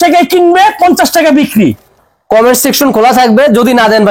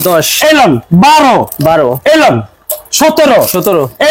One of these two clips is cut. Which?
first; 1 cut; at 1.9 s

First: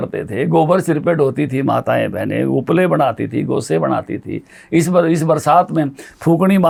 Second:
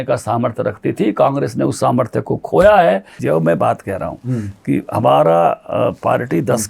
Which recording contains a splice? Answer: second; 1 cut; at 3.1 s

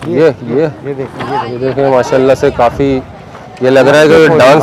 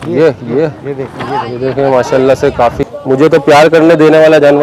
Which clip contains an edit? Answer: second; 1 cut; at 2.8 s

